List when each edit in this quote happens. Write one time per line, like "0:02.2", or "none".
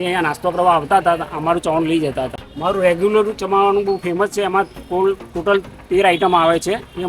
0:02.4